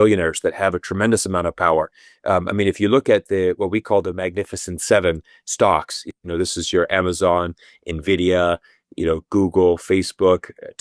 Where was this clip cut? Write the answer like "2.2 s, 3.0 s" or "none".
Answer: none